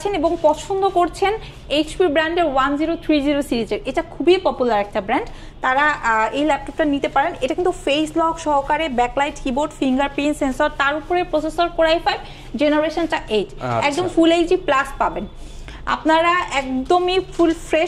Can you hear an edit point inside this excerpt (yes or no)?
no